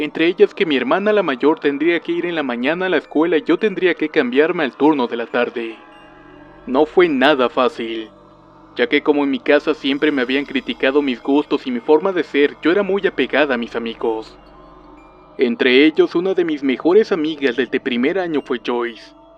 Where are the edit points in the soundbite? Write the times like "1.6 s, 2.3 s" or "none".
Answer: 12.7 s